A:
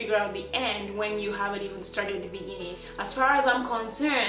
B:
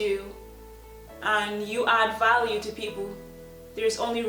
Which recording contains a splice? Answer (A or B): A